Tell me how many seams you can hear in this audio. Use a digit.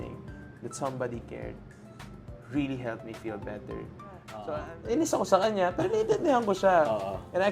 1